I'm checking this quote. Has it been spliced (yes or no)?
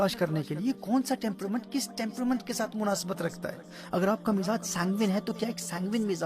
no